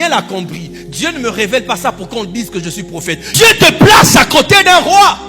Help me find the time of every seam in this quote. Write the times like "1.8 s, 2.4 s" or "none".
3.3 s